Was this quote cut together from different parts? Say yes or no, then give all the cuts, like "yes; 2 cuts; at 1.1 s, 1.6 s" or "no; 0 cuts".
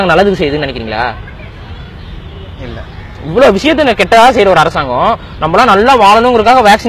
no; 0 cuts